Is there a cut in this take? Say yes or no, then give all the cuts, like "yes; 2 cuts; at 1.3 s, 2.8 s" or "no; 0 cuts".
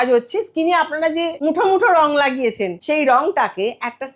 yes; 2 cuts; at 1.3 s, 2.8 s